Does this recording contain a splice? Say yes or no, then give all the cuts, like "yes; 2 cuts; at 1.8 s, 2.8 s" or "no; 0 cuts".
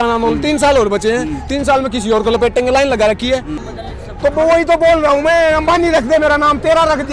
yes; 1 cut; at 3.6 s